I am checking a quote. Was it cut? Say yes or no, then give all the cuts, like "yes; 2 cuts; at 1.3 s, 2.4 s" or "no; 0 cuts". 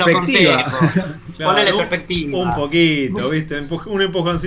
no; 0 cuts